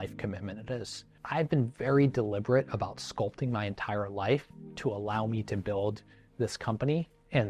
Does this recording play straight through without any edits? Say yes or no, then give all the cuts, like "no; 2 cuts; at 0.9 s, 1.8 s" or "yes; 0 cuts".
yes; 0 cuts